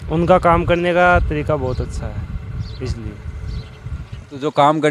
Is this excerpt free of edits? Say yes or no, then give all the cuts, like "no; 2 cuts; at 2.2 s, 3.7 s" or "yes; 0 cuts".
yes; 0 cuts